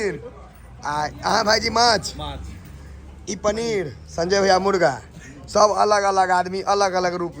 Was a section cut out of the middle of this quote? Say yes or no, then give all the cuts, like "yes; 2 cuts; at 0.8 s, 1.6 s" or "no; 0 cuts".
no; 0 cuts